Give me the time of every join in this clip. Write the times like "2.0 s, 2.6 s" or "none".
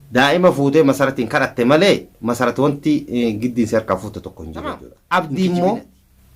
4.9 s